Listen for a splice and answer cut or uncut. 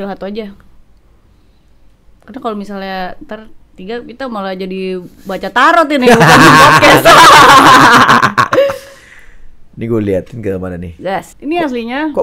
cut